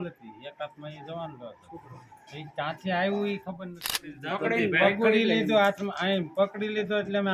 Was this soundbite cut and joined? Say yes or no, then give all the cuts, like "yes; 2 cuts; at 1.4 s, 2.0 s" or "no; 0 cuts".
yes; 1 cut; at 4.2 s